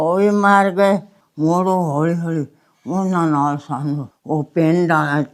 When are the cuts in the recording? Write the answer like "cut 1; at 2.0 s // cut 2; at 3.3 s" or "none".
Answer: cut 1; at 1.2 s